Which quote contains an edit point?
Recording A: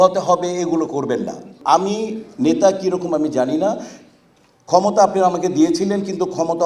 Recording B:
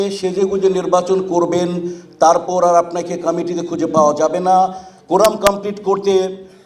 A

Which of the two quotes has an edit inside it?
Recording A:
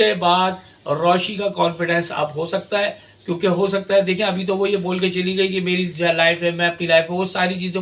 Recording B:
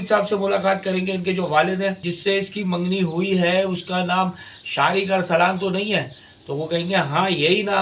B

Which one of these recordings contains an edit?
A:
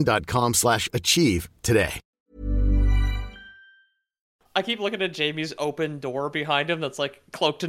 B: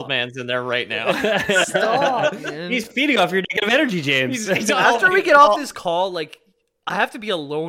A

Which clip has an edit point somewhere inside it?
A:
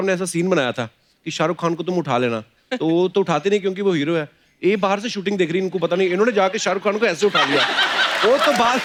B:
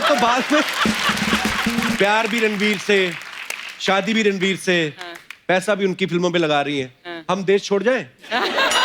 B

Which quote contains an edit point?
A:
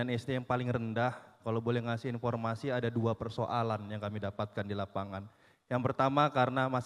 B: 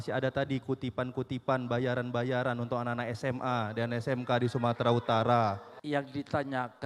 B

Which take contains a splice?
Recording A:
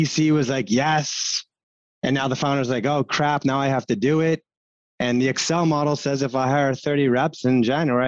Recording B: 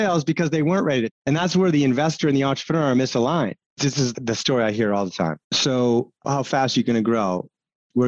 B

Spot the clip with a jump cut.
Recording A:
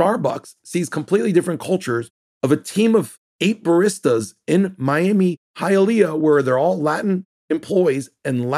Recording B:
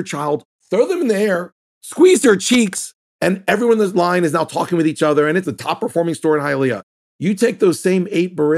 B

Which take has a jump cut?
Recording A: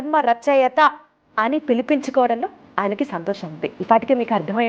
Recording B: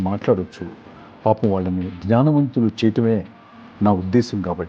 A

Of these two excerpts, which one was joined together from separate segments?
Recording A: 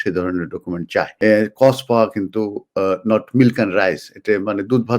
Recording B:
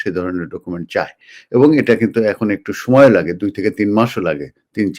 A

